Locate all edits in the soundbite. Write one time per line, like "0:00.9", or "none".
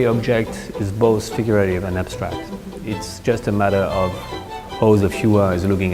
none